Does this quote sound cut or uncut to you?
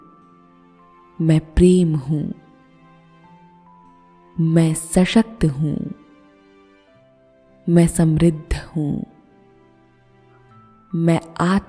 cut